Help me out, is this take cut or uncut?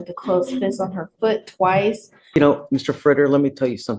cut